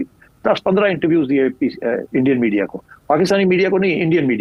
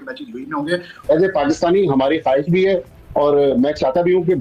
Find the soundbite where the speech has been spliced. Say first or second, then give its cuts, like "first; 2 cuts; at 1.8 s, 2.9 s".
second; 1 cut; at 1.0 s